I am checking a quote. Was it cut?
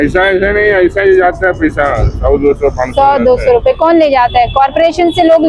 no; 0 cuts

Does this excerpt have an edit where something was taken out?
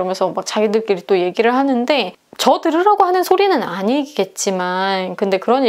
no; 0 cuts

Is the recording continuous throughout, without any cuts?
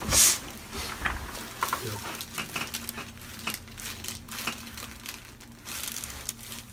yes; 0 cuts

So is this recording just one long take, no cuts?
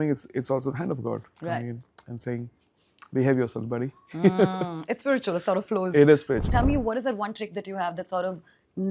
no; 1 cut; at 6.5 s

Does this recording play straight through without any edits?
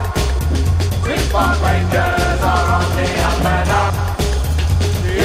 yes; 0 cuts

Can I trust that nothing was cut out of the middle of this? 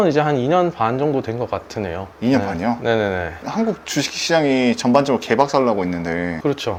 yes; 0 cuts

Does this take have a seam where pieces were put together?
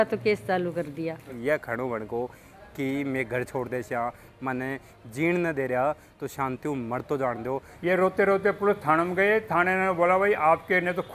yes; 2 cuts; at 1.3 s, 7.7 s

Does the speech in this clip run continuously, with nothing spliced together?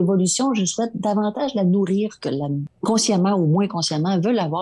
no; 1 cut; at 2.7 s

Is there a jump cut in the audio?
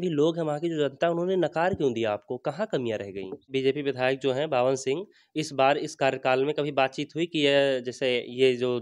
yes; 1 cut; at 3.5 s

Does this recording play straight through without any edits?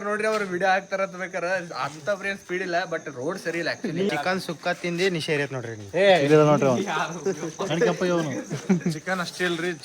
no; 1 cut; at 4.1 s

